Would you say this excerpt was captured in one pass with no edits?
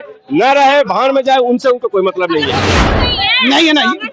no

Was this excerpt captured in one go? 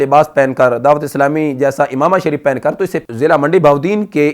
no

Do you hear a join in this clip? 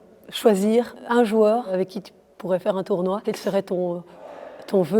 yes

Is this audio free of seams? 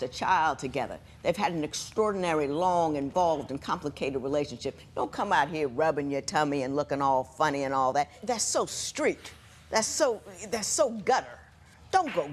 no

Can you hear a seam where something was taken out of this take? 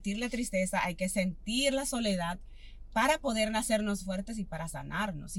no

